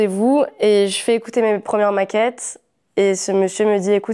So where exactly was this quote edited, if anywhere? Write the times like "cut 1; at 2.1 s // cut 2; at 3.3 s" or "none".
none